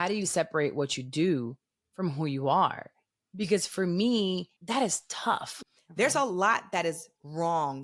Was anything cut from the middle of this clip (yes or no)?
yes